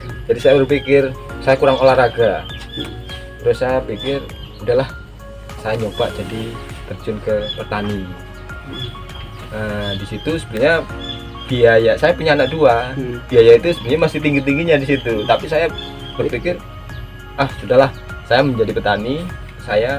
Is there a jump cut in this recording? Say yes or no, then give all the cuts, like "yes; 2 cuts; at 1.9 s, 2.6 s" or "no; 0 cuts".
no; 0 cuts